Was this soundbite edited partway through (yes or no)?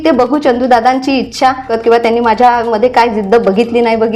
yes